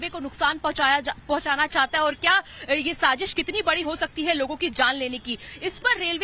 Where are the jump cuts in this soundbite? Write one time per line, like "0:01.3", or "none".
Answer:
0:04.3